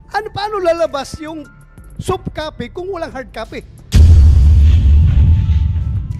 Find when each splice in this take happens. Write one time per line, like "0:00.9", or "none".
0:03.8